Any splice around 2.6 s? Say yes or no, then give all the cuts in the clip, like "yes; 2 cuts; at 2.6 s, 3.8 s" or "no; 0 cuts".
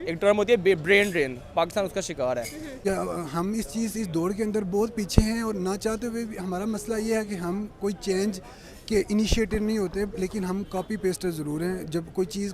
yes; 1 cut; at 2.6 s